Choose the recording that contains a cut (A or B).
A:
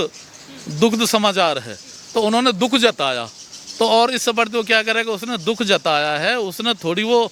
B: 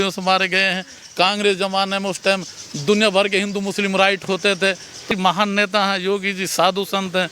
B